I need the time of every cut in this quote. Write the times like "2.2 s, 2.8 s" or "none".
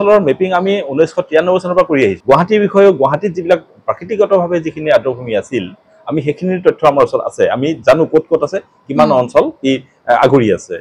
none